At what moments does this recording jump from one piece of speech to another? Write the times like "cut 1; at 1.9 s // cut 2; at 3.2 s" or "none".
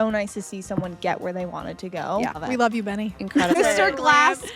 cut 1; at 2.4 s // cut 2; at 3.5 s